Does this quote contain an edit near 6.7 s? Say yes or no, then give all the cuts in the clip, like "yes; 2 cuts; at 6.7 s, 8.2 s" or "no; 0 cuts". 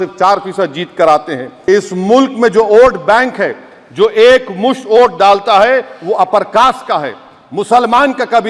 no; 1 cut; at 1.5 s